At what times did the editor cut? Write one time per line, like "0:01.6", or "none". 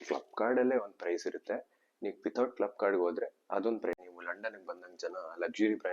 0:04.1